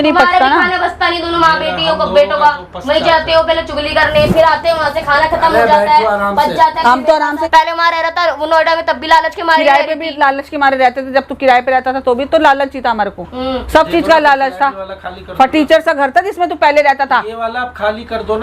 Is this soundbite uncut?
no; 1 cut; at 7.5 s

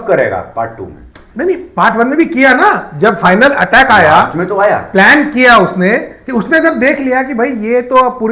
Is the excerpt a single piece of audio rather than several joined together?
yes; 0 cuts

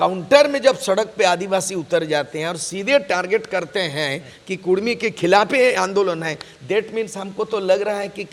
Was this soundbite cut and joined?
no; 0 cuts

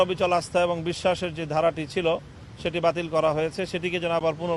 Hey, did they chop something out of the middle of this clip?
no; 0 cuts

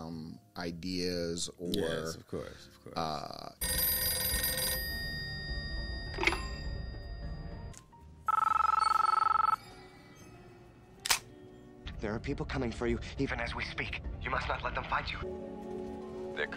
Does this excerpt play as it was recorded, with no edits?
no; 2 cuts; at 3.7 s, 11.8 s

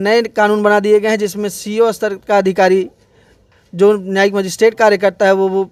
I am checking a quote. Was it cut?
no; 0 cuts

